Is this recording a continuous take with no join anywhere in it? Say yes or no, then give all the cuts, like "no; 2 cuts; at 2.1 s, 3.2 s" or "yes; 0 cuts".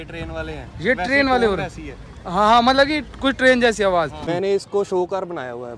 no; 1 cut; at 4.3 s